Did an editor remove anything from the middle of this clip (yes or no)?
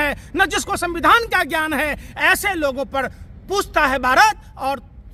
no